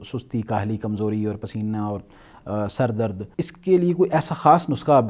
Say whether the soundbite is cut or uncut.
cut